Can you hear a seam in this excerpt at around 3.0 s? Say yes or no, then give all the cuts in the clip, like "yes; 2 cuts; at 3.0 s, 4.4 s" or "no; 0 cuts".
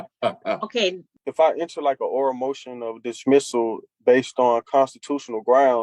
no; 1 cut; at 1.1 s